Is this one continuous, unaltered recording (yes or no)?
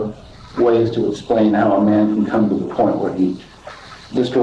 yes